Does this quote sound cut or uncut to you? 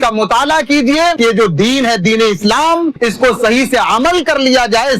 cut